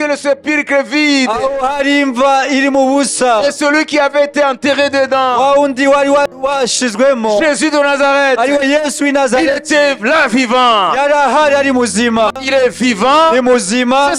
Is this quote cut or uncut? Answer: cut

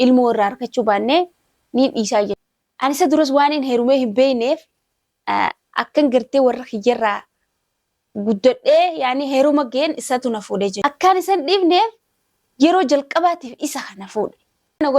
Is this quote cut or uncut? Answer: uncut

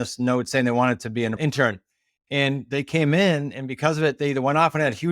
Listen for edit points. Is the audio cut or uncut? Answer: cut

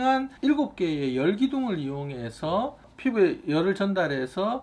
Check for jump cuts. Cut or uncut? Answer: uncut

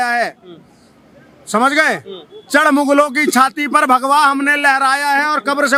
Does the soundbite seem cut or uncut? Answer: uncut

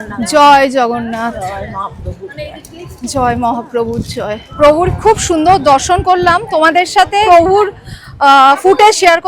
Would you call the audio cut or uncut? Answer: cut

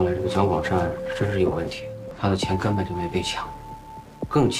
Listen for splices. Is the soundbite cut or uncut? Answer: cut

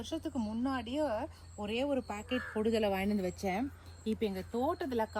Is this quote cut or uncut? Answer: uncut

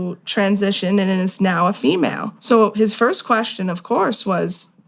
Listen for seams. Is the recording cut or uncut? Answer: cut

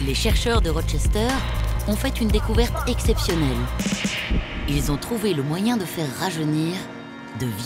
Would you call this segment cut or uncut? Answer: uncut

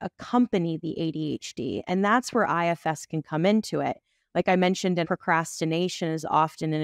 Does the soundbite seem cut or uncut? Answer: cut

